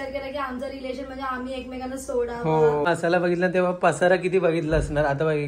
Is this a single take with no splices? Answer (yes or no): no